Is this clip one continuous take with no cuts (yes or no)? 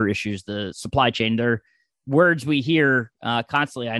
yes